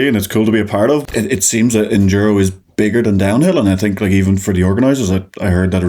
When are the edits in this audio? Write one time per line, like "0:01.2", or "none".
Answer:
0:01.0